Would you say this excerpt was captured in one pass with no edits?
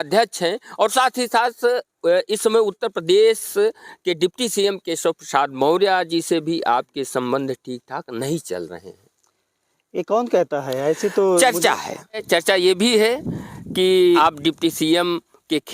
no; 2 cuts; at 12.2 s, 14.2 s

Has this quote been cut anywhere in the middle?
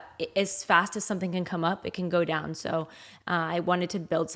no; 0 cuts

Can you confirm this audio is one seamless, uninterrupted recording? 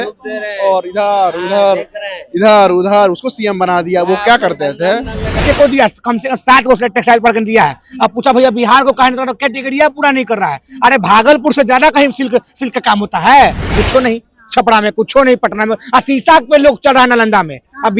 no; 2 cuts; at 5.4 s, 13.8 s

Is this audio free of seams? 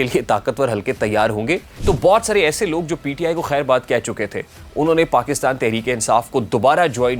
no; 1 cut; at 1.7 s

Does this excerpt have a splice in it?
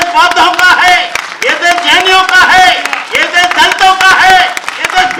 no; 0 cuts

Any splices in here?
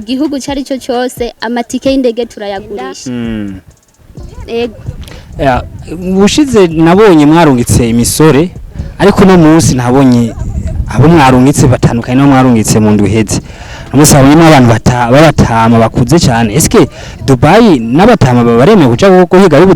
yes; 1 cut; at 3.0 s

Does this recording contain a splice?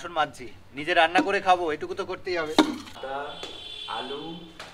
yes; 1 cut; at 3.0 s

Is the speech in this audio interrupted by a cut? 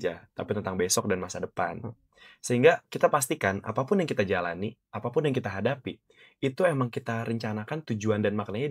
no; 0 cuts

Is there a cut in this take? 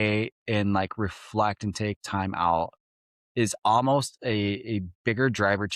no; 0 cuts

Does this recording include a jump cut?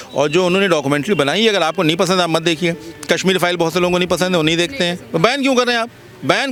no; 0 cuts

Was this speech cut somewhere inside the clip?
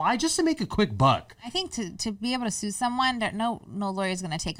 yes; 1 cut; at 1.6 s

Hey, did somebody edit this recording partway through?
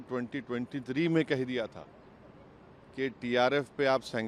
no; 0 cuts

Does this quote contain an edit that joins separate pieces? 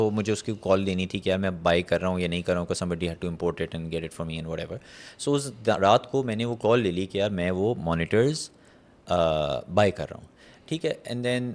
no; 0 cuts

